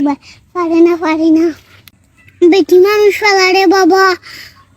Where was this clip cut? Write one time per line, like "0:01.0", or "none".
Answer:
0:01.7